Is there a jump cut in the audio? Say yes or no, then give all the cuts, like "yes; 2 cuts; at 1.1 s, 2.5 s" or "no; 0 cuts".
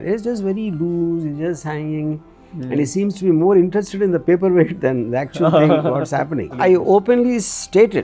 yes; 1 cut; at 6.6 s